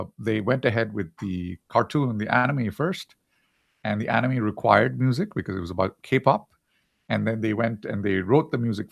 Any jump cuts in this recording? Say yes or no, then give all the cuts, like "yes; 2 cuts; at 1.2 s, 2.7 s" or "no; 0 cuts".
no; 0 cuts